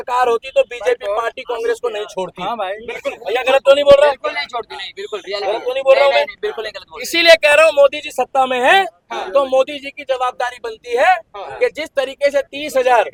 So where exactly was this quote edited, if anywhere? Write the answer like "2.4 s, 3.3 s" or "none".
none